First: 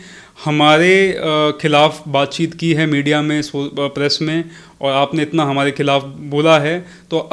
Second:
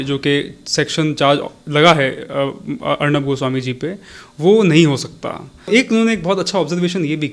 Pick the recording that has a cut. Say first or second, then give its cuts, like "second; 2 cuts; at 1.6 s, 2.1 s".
second; 1 cut; at 5.7 s